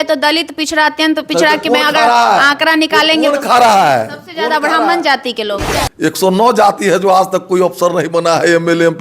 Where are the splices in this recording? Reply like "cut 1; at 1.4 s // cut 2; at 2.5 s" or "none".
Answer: cut 1; at 5.6 s